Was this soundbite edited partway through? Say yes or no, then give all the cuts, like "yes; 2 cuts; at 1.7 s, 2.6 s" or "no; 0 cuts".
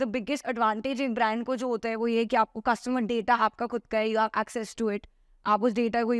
no; 0 cuts